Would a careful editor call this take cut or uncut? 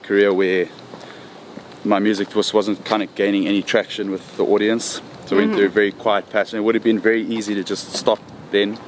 uncut